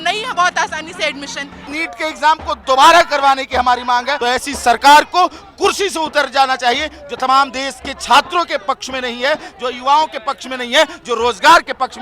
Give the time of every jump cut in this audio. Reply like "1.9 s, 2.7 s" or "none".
1.7 s, 4.1 s